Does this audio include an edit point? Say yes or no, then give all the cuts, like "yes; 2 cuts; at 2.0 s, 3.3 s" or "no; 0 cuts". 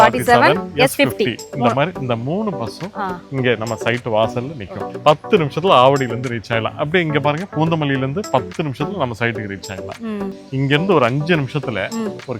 yes; 2 cuts; at 5.0 s, 10.3 s